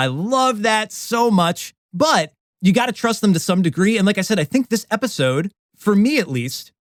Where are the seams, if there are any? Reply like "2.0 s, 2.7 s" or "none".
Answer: none